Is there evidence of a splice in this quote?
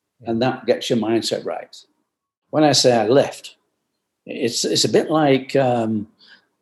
yes; 1 cut; at 2.4 s

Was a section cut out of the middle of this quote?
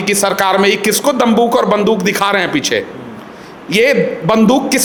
no; 0 cuts

